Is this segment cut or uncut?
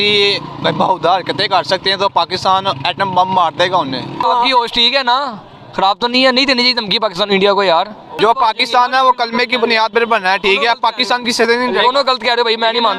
cut